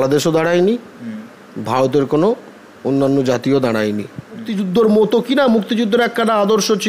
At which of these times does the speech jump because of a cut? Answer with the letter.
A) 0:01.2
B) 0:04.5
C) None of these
B